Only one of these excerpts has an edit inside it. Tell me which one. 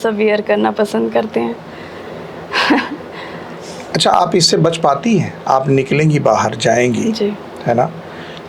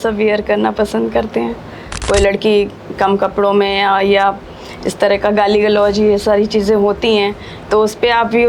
second; 1 cut; at 1.9 s

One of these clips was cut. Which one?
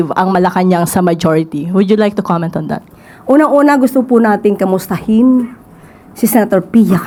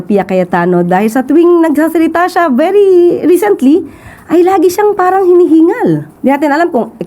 second; 1 cut; at 6.1 s

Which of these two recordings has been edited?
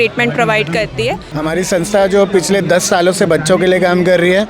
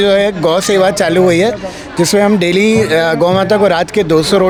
first; 1 cut; at 1.3 s

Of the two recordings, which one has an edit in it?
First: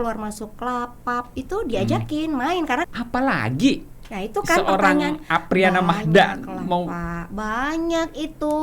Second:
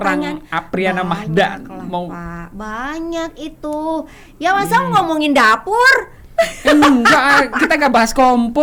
first; 1 cut; at 2.9 s

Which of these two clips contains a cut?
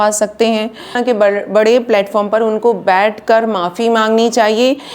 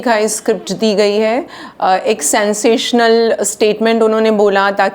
first; 1 cut; at 1.0 s

